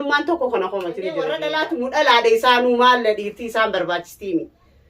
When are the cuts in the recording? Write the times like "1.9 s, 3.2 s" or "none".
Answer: 1.4 s